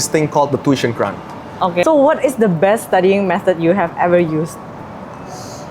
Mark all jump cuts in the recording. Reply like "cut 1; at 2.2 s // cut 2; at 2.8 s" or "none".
cut 1; at 1.8 s